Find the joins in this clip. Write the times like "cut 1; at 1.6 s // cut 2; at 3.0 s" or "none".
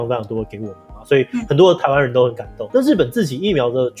none